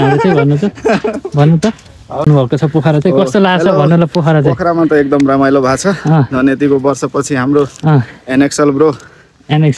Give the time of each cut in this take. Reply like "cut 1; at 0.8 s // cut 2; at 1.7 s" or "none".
cut 1; at 2.3 s